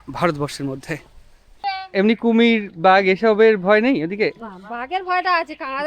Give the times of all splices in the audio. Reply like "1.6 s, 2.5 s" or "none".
1.5 s